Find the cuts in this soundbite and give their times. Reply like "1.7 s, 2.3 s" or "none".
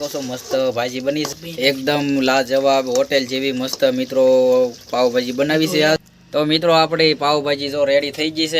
1.3 s, 6.1 s